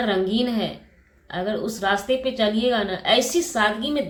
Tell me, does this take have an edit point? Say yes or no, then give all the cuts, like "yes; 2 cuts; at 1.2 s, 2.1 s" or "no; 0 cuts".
no; 0 cuts